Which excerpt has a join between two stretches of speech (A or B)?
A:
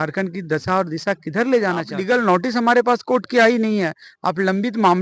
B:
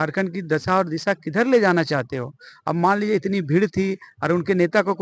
A